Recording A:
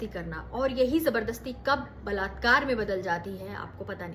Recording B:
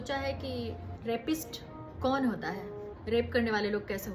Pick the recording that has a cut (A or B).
B